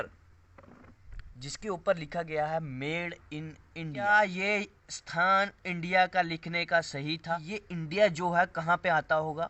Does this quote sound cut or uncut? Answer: cut